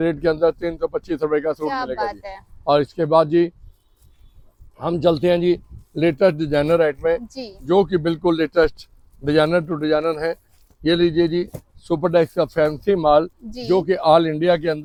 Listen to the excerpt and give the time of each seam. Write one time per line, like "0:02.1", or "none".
none